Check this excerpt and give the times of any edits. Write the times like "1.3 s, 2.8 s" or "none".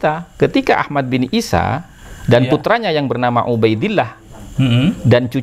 none